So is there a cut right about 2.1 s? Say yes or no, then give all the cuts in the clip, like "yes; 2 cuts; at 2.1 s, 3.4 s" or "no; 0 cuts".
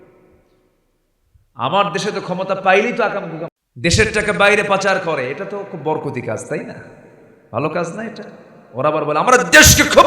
no; 1 cut; at 3.9 s